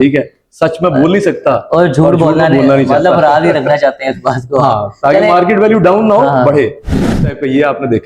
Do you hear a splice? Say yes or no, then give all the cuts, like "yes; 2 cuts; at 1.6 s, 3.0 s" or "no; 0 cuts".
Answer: yes; 1 cut; at 6.9 s